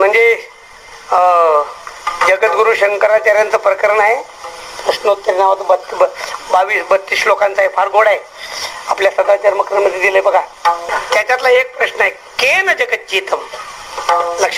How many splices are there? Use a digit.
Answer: 1